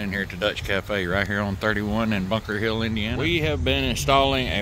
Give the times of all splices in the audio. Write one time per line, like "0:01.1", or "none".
0:03.1

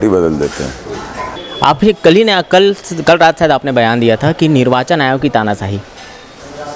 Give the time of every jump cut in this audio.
0:01.3

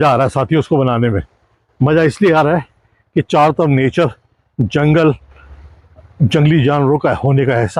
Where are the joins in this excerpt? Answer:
none

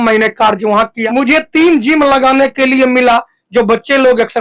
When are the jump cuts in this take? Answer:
0:01.0

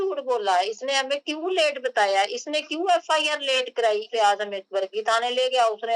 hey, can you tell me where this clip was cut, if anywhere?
0:04.1

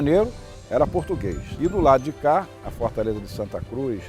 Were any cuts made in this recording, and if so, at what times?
0:01.5

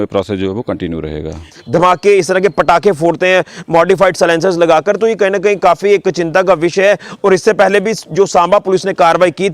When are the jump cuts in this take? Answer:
0:01.5

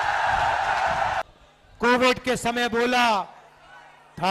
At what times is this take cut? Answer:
0:01.2

